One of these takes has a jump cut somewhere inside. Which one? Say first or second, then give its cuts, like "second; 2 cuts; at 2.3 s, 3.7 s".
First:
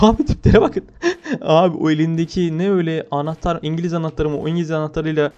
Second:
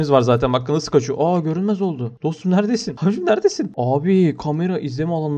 second; 1 cut; at 3.8 s